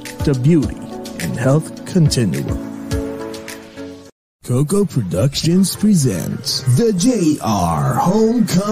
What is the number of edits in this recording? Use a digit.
1